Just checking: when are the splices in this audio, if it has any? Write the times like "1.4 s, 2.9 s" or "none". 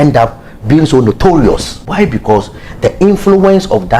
1.8 s